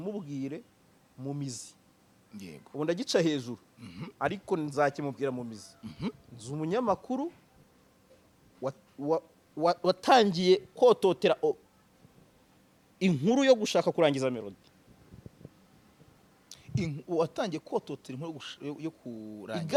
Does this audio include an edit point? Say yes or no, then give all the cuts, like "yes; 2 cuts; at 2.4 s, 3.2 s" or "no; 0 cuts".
no; 0 cuts